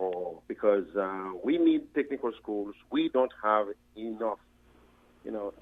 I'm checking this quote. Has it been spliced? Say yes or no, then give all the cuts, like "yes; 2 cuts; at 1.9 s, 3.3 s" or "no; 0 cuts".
no; 0 cuts